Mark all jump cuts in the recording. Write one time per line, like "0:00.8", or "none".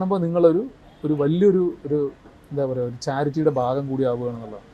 none

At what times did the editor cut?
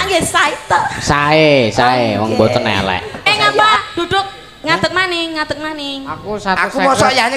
0:03.3

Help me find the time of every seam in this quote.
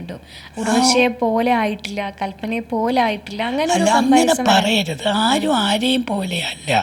none

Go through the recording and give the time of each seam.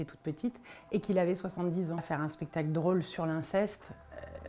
0:02.0

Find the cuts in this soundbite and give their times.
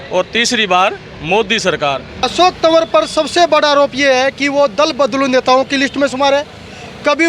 0:02.2

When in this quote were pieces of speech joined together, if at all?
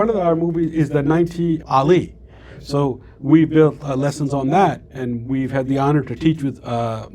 0:01.6

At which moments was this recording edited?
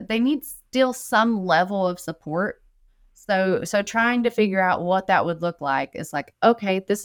none

